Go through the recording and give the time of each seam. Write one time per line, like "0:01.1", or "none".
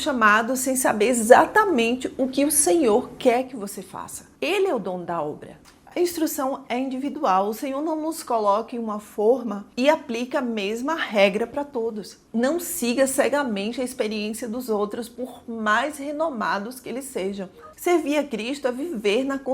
0:04.2
0:05.5
0:12.1
0:17.7